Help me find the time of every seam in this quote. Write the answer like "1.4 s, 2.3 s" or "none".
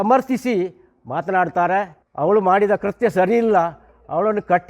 2.0 s